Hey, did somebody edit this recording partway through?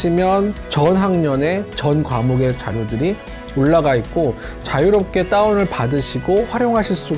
no; 0 cuts

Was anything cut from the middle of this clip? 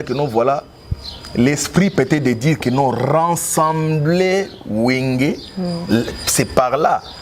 no; 0 cuts

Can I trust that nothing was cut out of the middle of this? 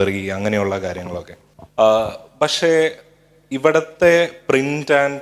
yes; 0 cuts

